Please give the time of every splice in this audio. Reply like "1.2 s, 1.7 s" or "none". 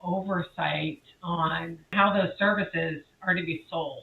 1.9 s